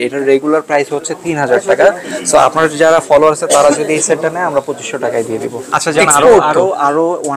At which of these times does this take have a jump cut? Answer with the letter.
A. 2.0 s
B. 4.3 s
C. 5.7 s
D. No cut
C